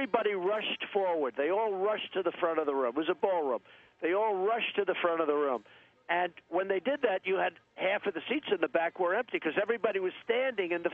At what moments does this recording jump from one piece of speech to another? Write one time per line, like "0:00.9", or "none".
none